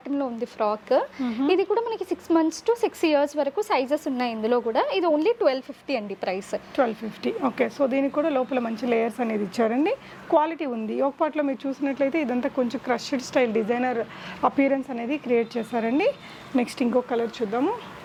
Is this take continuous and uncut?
yes; 0 cuts

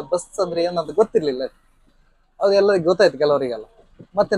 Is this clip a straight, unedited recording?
yes; 0 cuts

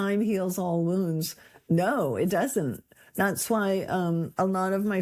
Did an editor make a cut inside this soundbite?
no; 0 cuts

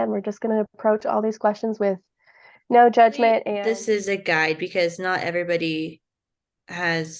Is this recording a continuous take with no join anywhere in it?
no; 1 cut; at 3.5 s

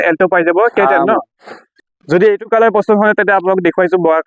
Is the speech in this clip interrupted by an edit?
yes; 1 cut; at 1.8 s

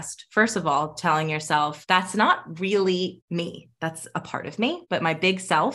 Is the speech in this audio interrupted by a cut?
yes; 3 cuts; at 1.8 s, 3.2 s, 4.8 s

